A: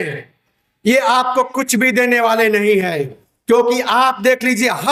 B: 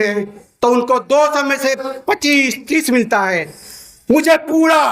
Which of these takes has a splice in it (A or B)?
B